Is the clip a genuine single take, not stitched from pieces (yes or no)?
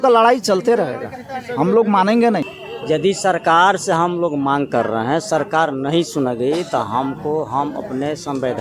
no